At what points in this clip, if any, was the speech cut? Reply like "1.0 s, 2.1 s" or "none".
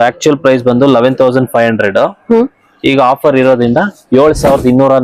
none